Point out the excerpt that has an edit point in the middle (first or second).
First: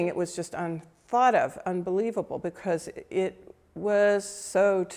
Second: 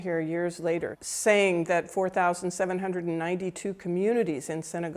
second